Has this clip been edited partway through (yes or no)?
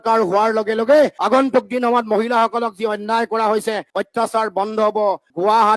yes